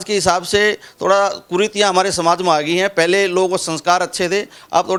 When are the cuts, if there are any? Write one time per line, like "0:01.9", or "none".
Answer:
none